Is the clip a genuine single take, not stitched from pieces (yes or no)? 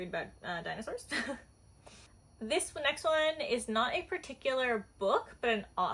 yes